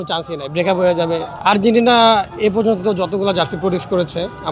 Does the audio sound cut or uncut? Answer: cut